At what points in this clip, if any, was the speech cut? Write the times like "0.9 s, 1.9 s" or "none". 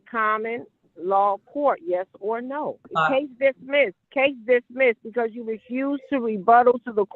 2.8 s, 4.0 s